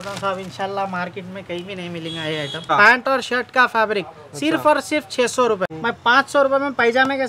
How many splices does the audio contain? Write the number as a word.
two